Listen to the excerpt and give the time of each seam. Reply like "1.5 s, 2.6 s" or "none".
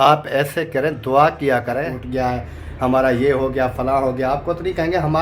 2.0 s